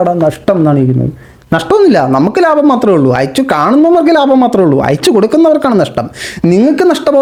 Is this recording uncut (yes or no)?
yes